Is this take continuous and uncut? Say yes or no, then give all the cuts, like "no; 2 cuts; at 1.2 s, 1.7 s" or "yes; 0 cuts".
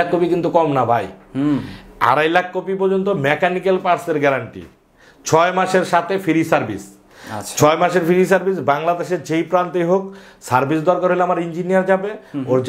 yes; 0 cuts